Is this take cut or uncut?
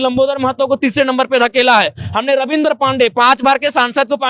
uncut